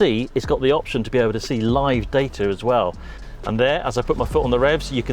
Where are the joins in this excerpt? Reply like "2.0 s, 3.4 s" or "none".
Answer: 3.1 s